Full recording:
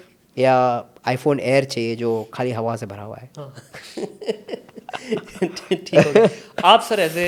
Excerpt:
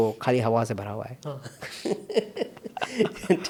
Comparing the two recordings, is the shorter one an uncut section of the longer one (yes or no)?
yes